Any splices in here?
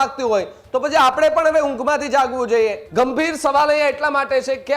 yes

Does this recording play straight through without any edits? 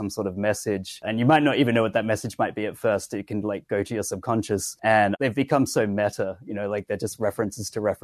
no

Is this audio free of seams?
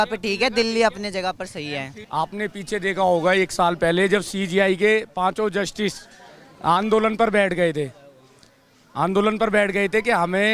no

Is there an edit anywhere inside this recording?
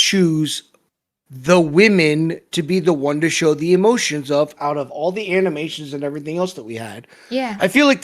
no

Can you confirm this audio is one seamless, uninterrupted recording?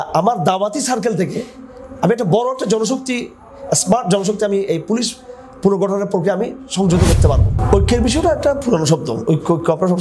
no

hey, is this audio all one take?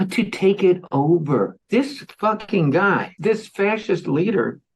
no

